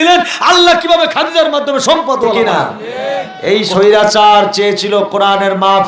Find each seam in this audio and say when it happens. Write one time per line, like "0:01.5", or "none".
0:02.4